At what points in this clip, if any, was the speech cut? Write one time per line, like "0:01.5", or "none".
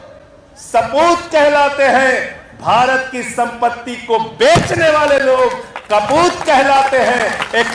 none

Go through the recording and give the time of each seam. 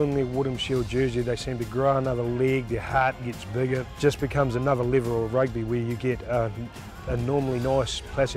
0:03.9

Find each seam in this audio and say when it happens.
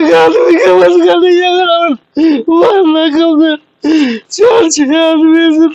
0:02.0

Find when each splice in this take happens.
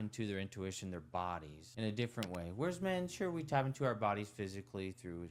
0:01.6

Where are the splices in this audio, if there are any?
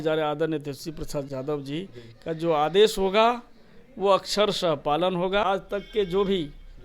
0:05.4

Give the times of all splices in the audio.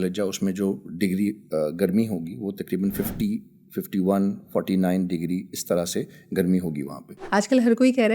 0:07.2

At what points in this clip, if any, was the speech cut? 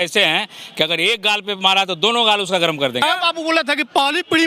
0:03.0

